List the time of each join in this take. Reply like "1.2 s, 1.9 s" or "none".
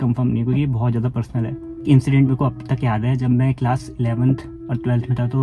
1.8 s, 4.5 s